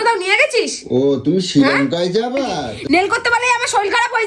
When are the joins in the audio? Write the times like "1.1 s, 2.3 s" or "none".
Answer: 2.7 s

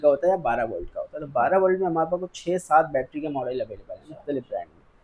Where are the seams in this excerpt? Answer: none

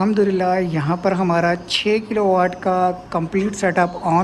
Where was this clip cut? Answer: none

